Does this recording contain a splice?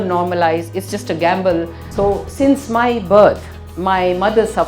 yes; 1 cut; at 1.8 s

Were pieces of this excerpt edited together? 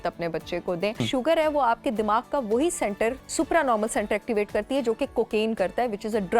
yes; 2 cuts; at 1.1 s, 3.2 s

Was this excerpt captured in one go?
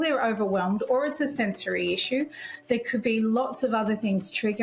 yes; 0 cuts

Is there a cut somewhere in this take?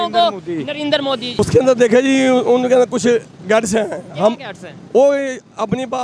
yes; 1 cut; at 1.4 s

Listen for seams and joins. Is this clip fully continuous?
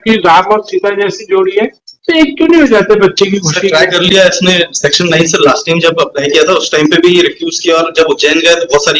yes; 0 cuts

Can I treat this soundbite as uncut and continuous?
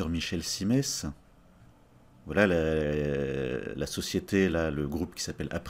yes; 0 cuts

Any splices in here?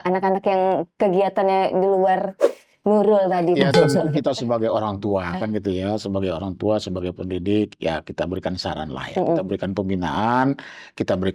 no; 0 cuts

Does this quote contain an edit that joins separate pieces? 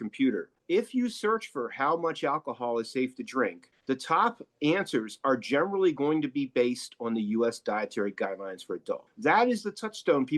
yes; 1 cut; at 9.0 s

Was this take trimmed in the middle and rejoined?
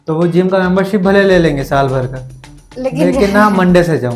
no; 0 cuts

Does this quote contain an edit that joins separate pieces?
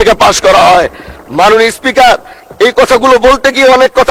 no; 0 cuts

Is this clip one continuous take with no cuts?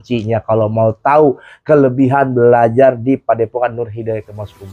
yes; 0 cuts

